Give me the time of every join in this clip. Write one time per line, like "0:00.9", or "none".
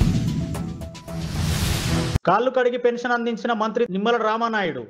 0:02.2